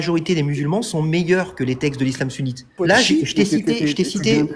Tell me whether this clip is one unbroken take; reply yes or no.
no